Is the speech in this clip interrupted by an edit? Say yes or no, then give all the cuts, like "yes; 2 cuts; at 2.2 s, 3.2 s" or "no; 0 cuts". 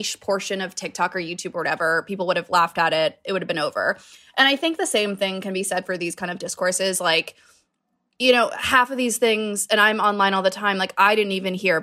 no; 0 cuts